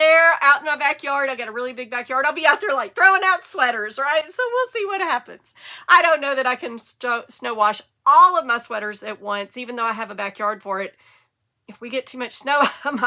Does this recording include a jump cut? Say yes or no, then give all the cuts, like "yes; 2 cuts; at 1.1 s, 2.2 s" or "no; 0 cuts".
no; 0 cuts